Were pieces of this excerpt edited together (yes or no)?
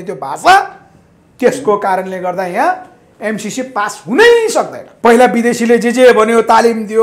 yes